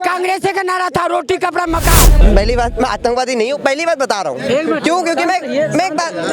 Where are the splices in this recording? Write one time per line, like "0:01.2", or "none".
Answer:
0:02.2